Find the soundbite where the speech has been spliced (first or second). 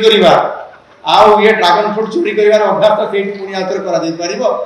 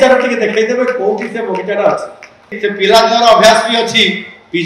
second